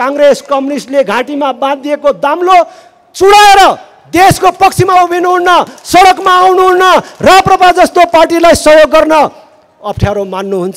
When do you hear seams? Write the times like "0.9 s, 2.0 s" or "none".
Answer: none

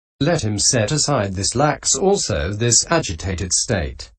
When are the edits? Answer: 1.4 s

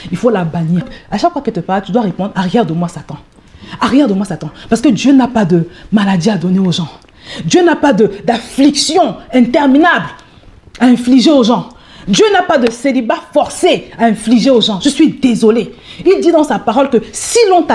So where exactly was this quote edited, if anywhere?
none

